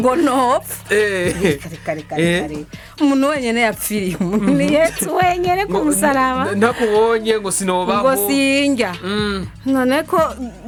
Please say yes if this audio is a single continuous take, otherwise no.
yes